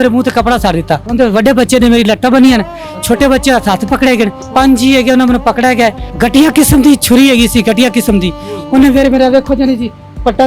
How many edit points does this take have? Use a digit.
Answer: 3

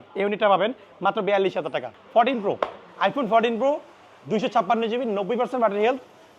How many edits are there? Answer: 1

